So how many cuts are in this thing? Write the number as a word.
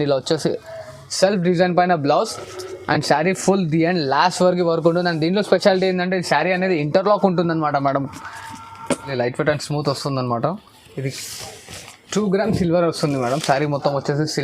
one